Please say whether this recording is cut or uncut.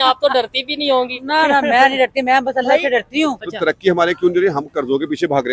cut